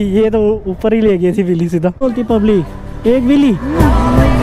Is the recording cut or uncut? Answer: cut